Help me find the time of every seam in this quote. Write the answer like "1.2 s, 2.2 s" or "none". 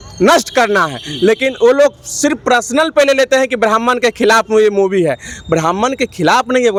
none